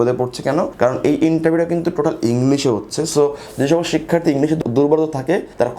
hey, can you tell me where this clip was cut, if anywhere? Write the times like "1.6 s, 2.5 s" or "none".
none